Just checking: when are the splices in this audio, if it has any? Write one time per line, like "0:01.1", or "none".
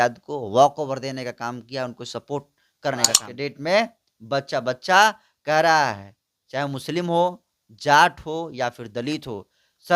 0:03.3